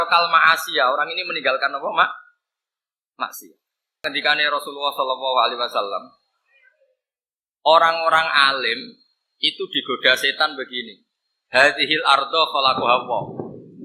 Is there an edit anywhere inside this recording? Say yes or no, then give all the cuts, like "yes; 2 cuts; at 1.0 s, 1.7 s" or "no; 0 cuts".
yes; 1 cut; at 4.0 s